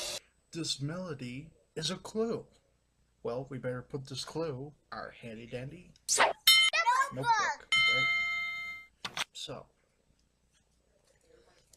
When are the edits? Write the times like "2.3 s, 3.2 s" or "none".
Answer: 7.1 s